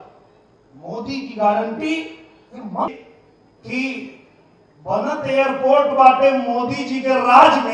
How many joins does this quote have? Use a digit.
1